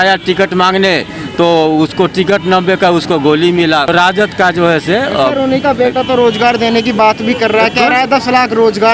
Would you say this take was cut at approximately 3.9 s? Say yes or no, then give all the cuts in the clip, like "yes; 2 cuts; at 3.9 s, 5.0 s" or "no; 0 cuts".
yes; 1 cut; at 3.9 s